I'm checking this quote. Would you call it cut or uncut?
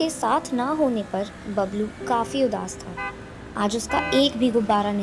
uncut